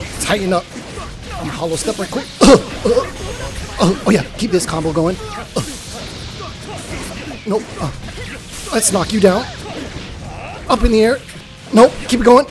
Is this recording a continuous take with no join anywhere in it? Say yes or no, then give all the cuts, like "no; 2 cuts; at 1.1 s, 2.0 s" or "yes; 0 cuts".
yes; 0 cuts